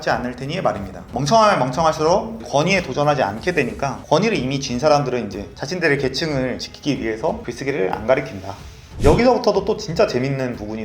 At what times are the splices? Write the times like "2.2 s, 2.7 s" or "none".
9.0 s